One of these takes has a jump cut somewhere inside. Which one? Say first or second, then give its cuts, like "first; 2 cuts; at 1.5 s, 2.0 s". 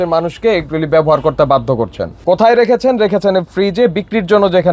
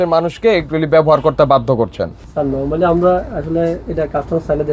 first; 1 cut; at 2.1 s